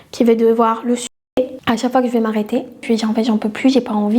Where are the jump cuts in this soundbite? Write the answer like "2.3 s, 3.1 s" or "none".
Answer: 1.0 s, 2.8 s